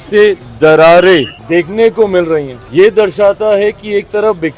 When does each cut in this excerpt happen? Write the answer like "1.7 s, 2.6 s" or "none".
1.4 s, 2.6 s